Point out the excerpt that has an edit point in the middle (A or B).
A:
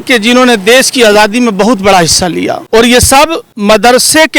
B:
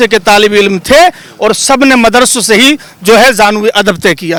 A